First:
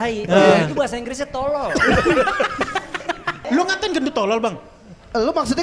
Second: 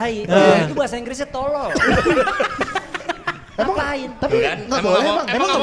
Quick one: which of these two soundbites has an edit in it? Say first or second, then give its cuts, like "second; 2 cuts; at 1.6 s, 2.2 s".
first; 1 cut; at 3.5 s